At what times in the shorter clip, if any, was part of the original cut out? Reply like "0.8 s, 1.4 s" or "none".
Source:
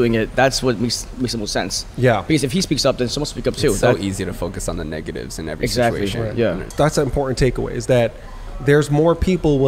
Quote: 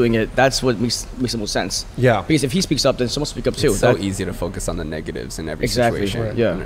none